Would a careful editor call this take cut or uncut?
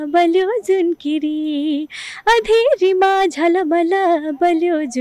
uncut